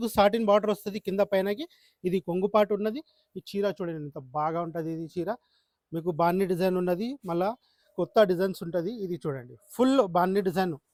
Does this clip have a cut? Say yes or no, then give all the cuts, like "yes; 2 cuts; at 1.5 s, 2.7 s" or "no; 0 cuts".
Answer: no; 0 cuts